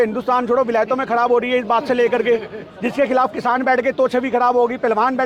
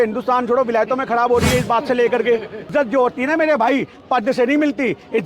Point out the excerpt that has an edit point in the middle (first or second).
second